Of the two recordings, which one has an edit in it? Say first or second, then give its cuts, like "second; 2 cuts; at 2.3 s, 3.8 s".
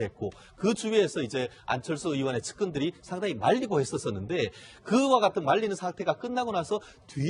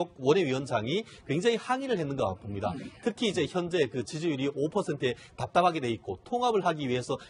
first; 1 cut; at 2.5 s